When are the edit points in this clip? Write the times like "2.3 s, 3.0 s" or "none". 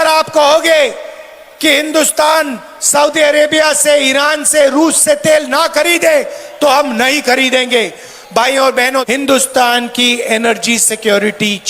9.1 s